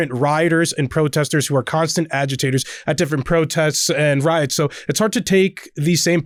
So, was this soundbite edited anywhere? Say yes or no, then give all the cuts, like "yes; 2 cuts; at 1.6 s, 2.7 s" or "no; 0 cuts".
no; 0 cuts